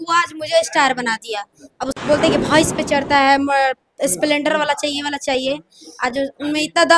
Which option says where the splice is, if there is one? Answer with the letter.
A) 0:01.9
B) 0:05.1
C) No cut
A